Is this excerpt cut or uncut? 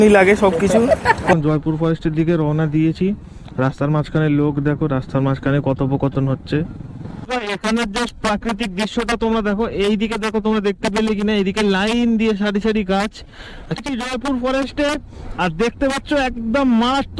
cut